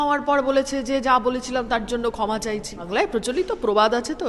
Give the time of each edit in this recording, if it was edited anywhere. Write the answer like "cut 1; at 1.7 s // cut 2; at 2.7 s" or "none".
cut 1; at 2.9 s